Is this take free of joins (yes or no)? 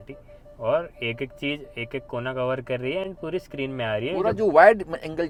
yes